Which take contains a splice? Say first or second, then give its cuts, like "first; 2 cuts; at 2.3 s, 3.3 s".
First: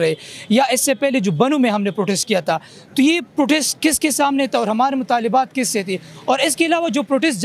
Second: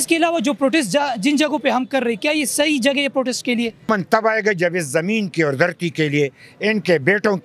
second; 1 cut; at 3.9 s